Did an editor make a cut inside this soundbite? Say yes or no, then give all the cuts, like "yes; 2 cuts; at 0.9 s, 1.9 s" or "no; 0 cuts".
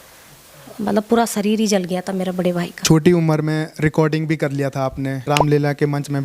yes; 2 cuts; at 2.8 s, 5.2 s